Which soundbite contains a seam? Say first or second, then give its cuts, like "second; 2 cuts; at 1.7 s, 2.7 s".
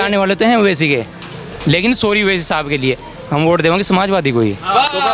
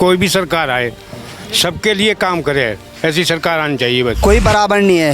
second; 1 cut; at 4.2 s